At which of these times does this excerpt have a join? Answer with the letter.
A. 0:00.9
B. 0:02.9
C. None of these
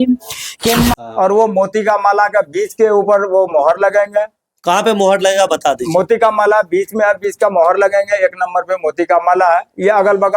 A